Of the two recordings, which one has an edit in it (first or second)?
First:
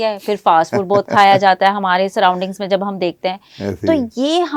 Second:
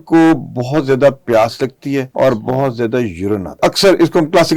second